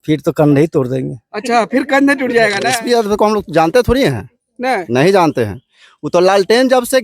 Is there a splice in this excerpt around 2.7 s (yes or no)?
yes